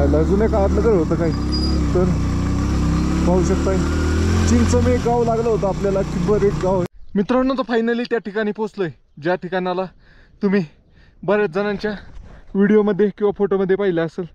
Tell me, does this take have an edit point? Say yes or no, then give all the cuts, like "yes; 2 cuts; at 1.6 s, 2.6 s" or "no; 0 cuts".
yes; 1 cut; at 6.9 s